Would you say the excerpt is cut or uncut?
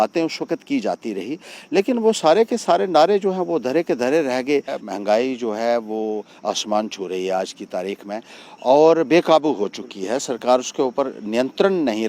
cut